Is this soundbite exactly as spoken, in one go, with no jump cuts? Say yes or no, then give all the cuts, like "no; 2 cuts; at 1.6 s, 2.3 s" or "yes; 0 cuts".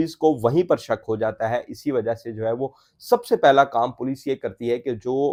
yes; 0 cuts